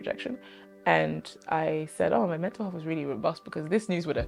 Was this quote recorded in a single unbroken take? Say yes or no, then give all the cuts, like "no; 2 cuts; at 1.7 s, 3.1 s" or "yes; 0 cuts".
yes; 0 cuts